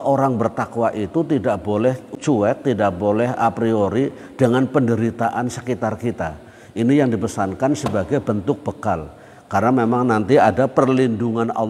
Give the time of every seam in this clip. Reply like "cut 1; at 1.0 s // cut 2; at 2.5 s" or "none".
cut 1; at 2.1 s